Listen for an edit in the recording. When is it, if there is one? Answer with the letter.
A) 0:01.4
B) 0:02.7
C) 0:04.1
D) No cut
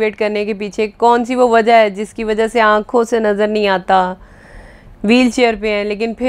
D